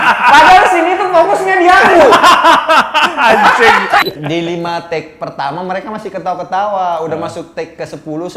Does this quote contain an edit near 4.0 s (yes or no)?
yes